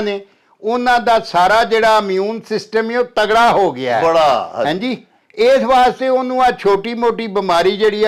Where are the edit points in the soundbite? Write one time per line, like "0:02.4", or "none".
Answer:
none